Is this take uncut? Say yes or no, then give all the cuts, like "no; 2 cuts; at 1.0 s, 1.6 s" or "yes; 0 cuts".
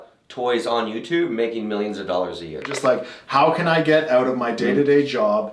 no; 1 cut; at 2.7 s